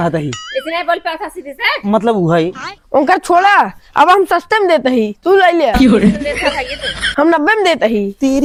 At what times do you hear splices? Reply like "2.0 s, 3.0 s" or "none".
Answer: none